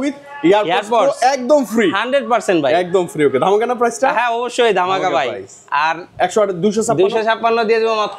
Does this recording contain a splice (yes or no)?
no